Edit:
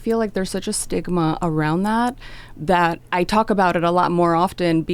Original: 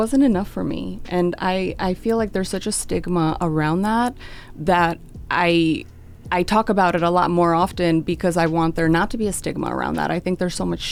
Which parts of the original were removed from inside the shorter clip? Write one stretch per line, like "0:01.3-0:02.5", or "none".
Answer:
0:05.0-0:06.2